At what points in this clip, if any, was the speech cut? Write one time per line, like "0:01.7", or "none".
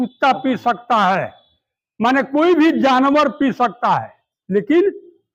none